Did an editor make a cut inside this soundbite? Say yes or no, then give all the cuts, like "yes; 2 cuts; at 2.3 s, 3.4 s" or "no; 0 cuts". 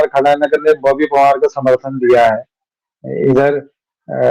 no; 0 cuts